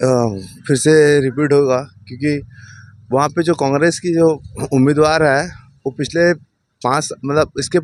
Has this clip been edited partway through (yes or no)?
no